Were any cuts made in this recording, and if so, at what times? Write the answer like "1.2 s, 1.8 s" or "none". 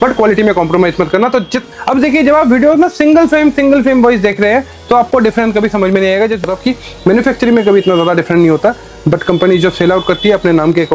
1.6 s, 6.4 s